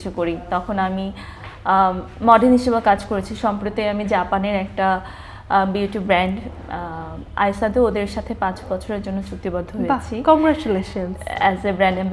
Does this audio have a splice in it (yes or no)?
no